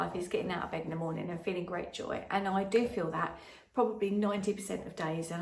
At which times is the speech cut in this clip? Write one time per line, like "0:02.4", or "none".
none